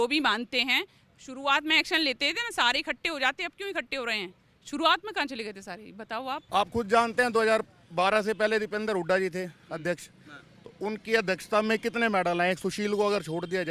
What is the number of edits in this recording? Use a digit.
1